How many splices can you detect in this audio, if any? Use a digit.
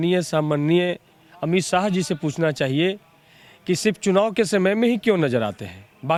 0